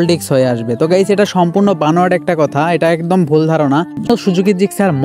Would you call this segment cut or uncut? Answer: cut